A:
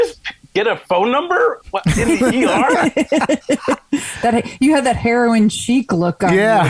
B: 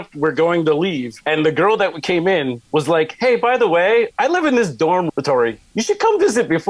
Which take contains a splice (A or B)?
B